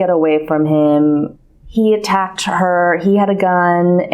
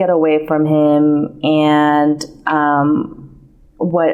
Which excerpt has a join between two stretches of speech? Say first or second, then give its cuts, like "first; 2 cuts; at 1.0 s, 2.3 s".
first; 1 cut; at 1.3 s